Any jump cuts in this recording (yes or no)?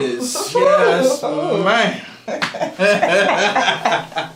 no